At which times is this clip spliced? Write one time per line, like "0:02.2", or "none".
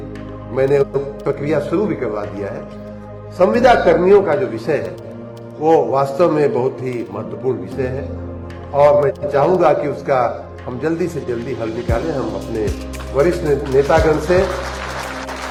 none